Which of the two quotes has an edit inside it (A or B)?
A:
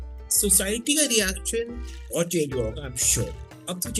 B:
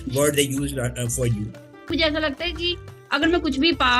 B